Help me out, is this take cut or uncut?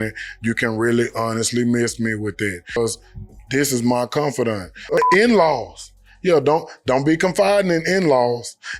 cut